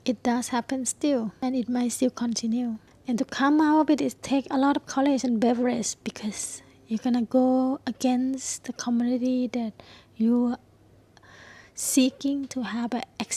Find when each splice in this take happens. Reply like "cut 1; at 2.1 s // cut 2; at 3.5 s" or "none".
cut 1; at 1.3 s // cut 2; at 2.9 s